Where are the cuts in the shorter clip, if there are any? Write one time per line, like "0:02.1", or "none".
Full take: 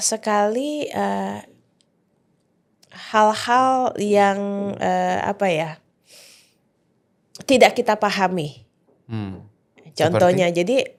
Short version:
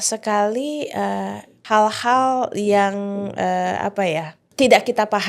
0:01.5
0:04.4